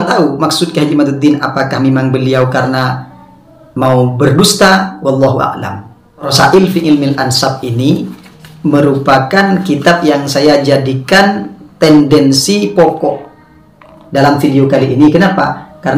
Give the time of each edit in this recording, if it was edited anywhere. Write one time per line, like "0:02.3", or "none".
0:06.3